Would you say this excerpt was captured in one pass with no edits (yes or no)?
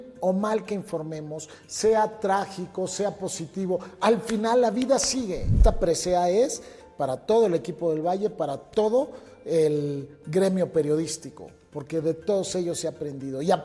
no